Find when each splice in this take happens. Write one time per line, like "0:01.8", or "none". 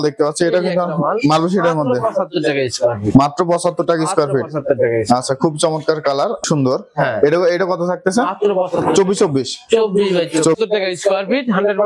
0:06.4
0:10.6